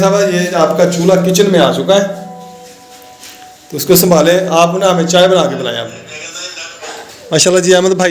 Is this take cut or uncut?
cut